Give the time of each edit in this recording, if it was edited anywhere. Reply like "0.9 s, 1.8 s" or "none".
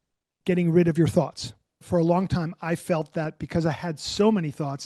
1.8 s